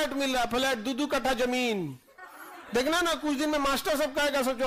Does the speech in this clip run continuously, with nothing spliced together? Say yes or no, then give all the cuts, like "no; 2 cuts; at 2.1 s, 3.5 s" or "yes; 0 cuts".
yes; 0 cuts